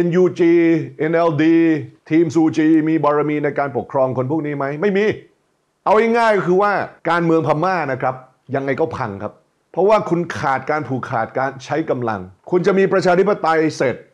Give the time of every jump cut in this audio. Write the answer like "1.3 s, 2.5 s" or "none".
6.9 s